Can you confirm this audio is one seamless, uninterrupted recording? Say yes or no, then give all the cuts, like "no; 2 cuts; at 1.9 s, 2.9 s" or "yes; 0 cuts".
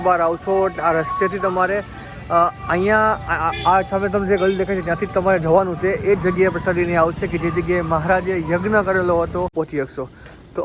no; 1 cut; at 9.5 s